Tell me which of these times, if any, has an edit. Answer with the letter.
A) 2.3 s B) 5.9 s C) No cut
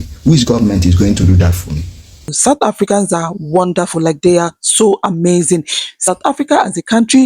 A